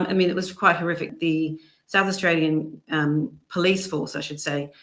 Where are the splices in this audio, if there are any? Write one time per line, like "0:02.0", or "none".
0:01.1